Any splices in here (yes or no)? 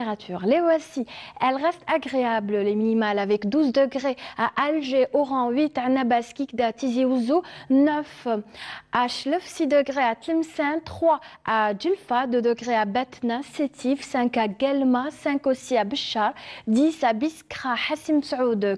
yes